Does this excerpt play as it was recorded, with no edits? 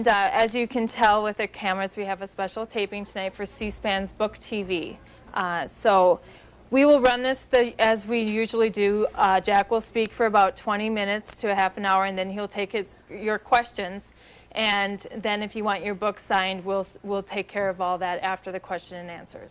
yes; 0 cuts

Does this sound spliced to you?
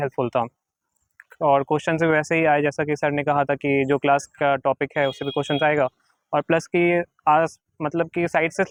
no; 0 cuts

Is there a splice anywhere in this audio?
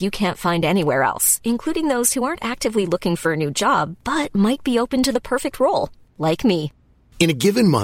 no; 0 cuts

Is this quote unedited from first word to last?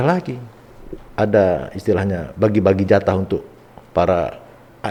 yes; 0 cuts

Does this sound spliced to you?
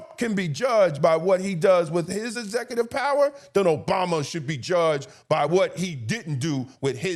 no; 0 cuts

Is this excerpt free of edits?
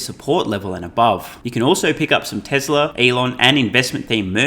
no; 2 cuts; at 1.4 s, 2.9 s

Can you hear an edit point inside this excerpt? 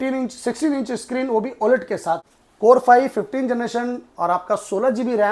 yes; 1 cut; at 2.4 s

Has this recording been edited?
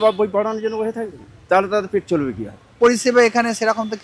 yes; 1 cut; at 2.8 s

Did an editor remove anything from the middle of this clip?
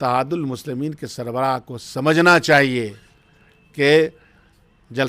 no; 0 cuts

